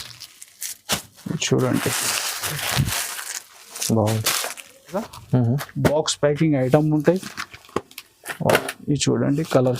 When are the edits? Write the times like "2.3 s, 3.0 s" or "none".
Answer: 5.1 s